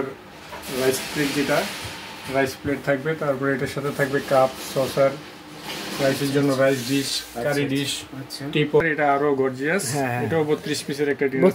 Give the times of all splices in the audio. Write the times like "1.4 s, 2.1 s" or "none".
8.8 s